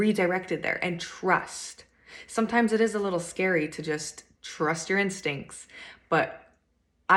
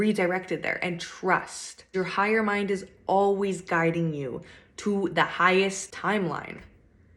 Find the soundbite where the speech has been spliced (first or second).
second